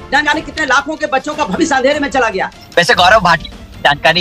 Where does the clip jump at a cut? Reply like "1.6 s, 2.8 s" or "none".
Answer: 2.6 s